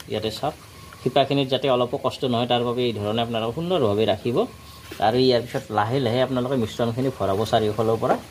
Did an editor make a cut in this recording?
no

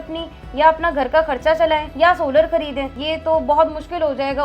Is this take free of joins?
no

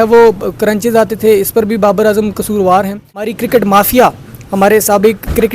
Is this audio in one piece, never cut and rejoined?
no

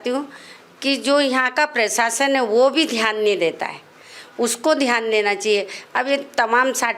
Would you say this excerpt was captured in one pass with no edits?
yes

